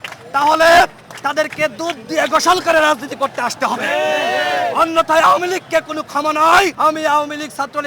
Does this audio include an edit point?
yes; 1 cut; at 6.7 s

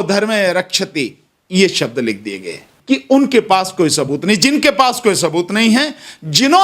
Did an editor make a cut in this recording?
yes; 1 cut; at 2.7 s

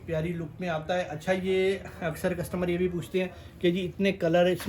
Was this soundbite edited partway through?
no; 0 cuts

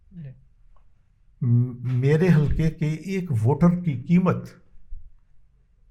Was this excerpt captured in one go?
yes; 0 cuts

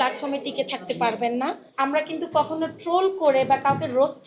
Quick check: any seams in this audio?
yes; 1 cut; at 1.6 s

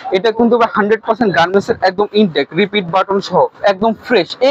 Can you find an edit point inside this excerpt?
yes; 1 cut; at 3.6 s

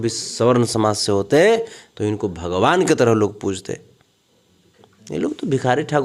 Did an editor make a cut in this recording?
no; 0 cuts

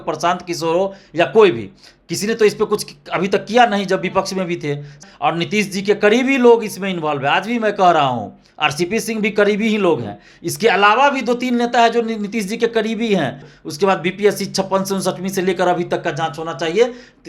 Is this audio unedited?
no; 2 cuts; at 5.0 s, 13.5 s

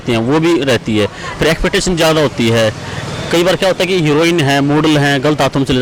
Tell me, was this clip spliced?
no; 0 cuts

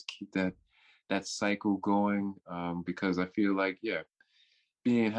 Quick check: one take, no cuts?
yes; 0 cuts

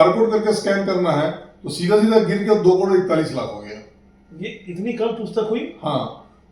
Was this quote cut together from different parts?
no; 0 cuts

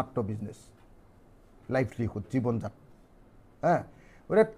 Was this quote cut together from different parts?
no; 0 cuts

